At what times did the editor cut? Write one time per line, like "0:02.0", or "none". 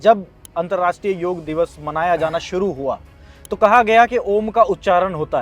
0:01.4